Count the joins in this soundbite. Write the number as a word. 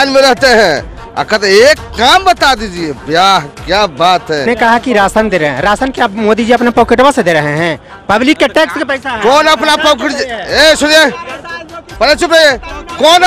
one